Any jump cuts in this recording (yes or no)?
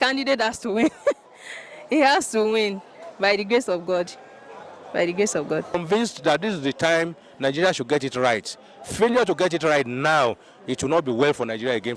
yes